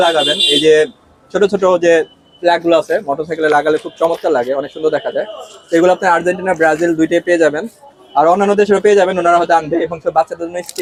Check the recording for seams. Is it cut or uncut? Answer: uncut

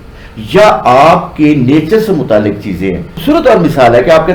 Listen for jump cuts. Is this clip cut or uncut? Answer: uncut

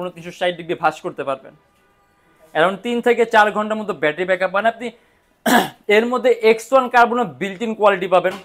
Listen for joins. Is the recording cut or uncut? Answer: uncut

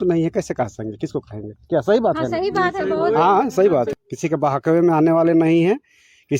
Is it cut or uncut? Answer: cut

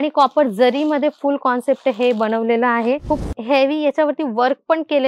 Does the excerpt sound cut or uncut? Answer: cut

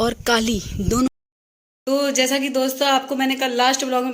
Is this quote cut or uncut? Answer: cut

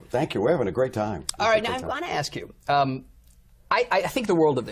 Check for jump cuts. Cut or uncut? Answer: uncut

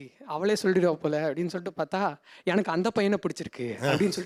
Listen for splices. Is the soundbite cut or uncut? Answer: uncut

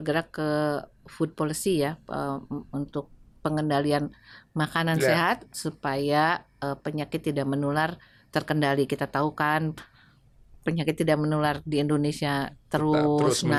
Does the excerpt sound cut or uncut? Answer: uncut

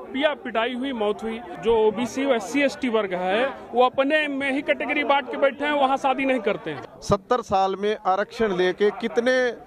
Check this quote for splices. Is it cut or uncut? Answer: cut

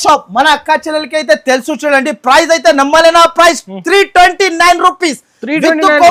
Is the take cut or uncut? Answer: uncut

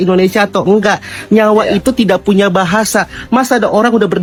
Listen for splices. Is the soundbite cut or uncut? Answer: uncut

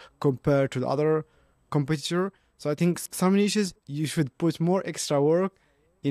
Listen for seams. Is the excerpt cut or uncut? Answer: uncut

